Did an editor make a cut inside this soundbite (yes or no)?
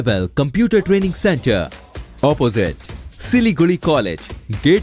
no